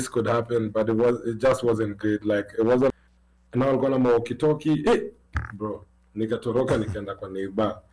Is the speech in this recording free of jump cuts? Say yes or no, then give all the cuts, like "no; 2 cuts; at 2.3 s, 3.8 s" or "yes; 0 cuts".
no; 1 cut; at 2.9 s